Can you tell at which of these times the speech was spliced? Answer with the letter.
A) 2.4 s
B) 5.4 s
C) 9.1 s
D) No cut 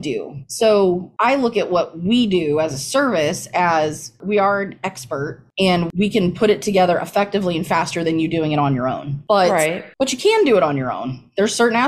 D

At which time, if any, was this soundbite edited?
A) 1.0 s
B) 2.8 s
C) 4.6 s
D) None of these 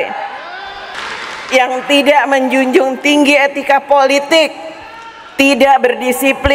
A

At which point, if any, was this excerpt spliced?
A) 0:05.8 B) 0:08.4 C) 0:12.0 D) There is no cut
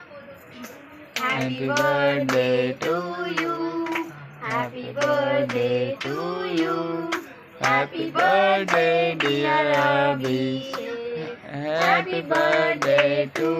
D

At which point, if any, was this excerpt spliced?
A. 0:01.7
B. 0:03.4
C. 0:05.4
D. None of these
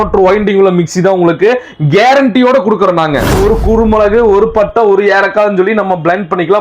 B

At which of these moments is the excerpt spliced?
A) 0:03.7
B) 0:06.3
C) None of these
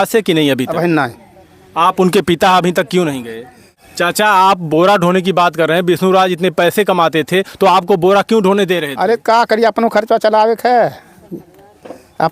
A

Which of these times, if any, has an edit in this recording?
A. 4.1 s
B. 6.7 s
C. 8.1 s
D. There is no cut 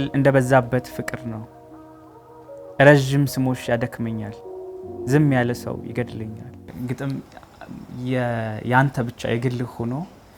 B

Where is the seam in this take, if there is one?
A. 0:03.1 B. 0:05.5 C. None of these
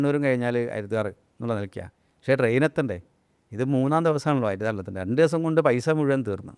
C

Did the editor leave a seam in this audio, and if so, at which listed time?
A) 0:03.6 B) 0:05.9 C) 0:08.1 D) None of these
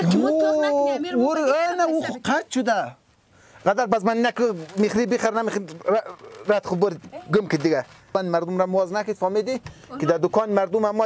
C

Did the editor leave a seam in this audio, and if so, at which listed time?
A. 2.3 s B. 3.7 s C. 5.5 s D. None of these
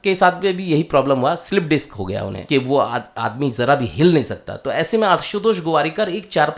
A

